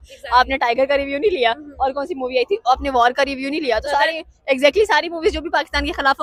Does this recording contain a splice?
no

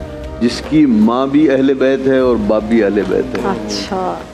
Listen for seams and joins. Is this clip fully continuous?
yes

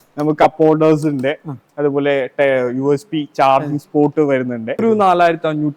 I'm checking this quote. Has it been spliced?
yes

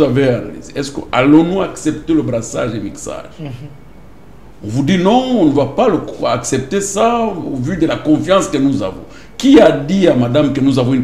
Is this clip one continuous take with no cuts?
yes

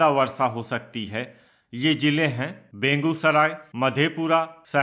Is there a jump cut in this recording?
yes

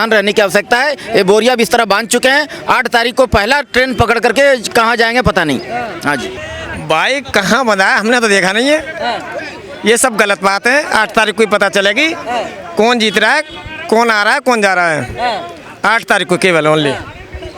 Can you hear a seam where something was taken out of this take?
no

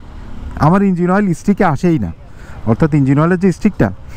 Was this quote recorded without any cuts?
yes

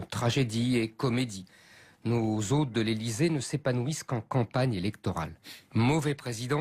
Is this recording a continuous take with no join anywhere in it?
yes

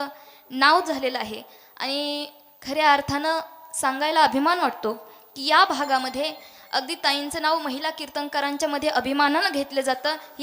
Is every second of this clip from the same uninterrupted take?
yes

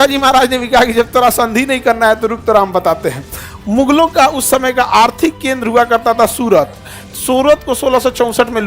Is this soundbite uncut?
yes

